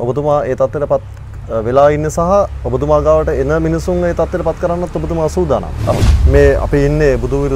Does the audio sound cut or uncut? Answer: cut